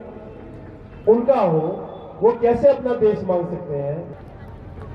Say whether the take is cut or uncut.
cut